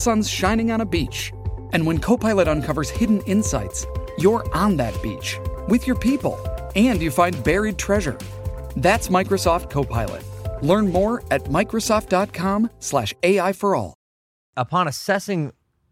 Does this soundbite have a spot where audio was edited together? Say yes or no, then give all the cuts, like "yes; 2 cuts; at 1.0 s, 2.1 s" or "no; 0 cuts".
yes; 1 cut; at 14.5 s